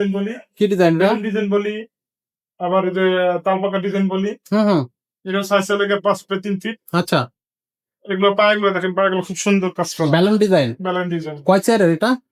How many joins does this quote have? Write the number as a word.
zero